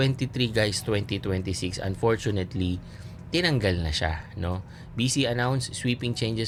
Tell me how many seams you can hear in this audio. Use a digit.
0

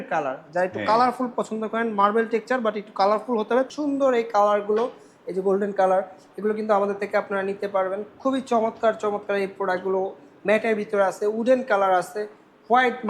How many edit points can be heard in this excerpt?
1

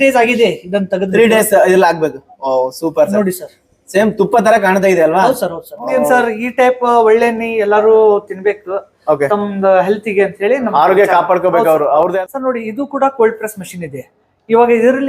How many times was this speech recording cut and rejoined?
2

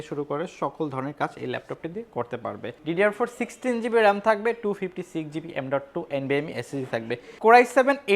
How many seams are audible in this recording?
2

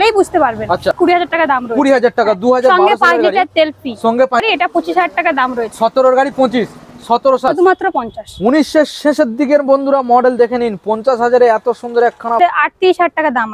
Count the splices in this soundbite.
4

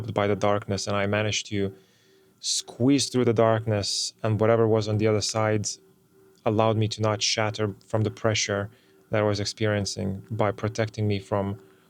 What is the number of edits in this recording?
0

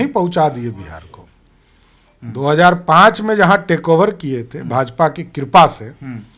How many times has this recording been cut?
0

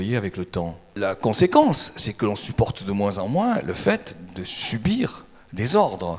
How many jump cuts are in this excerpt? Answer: 1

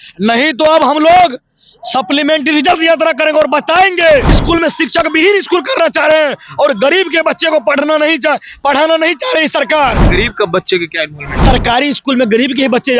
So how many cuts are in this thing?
3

